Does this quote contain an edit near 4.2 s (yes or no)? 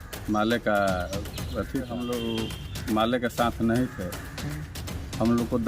no